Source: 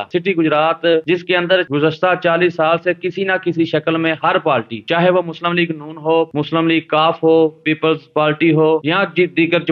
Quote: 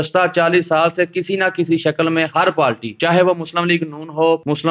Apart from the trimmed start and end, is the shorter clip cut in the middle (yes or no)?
no